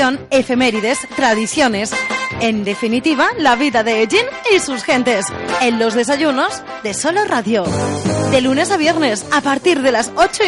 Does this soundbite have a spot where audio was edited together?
no; 0 cuts

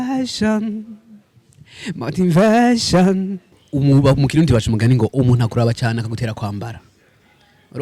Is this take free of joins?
no; 1 cut; at 3.7 s

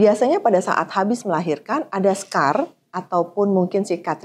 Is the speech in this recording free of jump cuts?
yes; 0 cuts

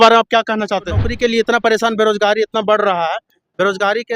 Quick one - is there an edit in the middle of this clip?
yes; 1 cut; at 1.0 s

